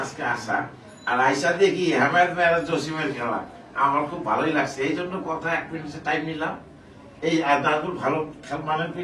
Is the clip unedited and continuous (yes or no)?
yes